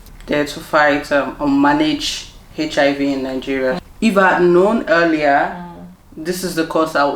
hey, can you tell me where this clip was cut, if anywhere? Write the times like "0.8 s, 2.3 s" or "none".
3.8 s